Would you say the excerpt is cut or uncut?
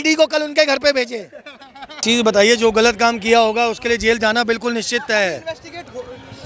cut